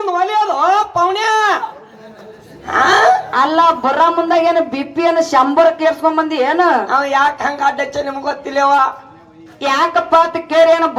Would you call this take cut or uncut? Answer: uncut